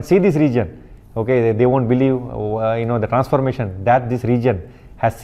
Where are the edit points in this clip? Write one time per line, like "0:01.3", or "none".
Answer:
none